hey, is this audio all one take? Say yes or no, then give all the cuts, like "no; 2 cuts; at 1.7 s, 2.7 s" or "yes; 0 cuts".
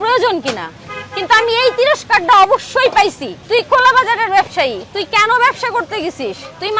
yes; 0 cuts